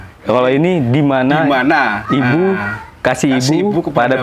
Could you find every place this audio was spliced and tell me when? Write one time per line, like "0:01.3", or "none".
none